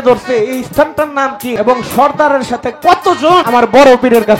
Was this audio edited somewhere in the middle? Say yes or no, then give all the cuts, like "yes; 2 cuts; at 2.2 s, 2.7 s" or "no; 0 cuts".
yes; 2 cuts; at 1.5 s, 3.5 s